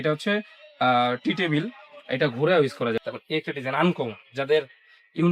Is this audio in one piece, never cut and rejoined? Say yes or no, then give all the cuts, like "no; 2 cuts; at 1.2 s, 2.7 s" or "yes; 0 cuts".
no; 1 cut; at 3.0 s